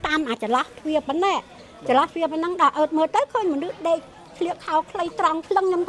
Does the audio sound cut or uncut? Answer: uncut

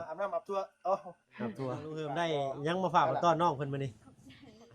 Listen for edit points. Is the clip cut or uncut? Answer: cut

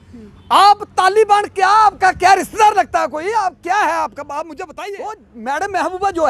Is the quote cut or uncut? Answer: cut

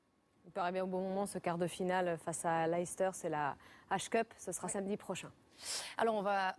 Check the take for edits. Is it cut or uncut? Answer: cut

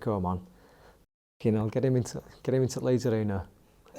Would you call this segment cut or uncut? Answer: uncut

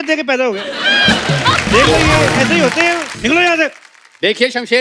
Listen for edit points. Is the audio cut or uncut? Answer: cut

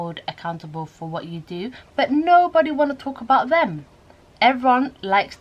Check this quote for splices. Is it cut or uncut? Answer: cut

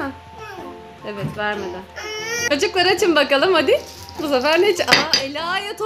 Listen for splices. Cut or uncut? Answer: cut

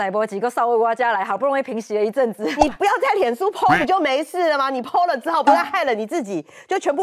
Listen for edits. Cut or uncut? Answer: uncut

